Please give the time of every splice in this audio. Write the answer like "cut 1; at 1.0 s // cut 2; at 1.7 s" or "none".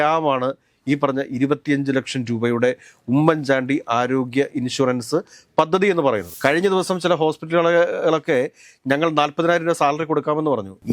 cut 1; at 6.3 s